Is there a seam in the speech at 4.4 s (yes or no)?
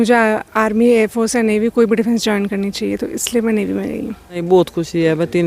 yes